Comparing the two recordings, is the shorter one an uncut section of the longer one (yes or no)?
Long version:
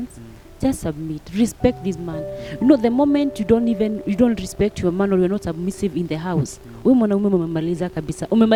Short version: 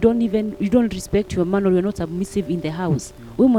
yes